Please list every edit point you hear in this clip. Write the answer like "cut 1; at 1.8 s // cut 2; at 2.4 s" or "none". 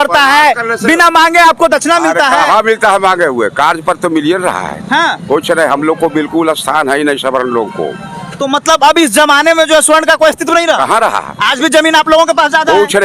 none